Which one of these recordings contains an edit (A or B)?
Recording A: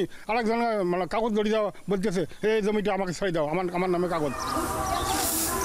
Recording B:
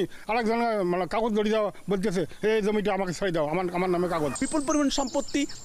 B